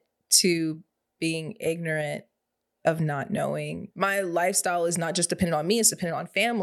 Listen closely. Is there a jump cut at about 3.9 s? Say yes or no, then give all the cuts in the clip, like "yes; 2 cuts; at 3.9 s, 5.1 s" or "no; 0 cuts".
yes; 1 cut; at 3.9 s